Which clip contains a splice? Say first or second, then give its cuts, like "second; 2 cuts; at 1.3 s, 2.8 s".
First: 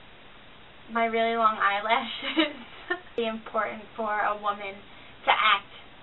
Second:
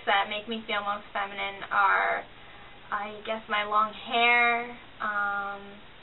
first; 1 cut; at 3.0 s